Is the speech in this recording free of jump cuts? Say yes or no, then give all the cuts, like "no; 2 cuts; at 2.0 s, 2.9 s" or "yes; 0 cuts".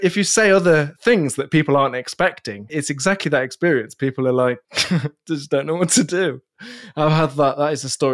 no; 2 cuts; at 2.6 s, 4.7 s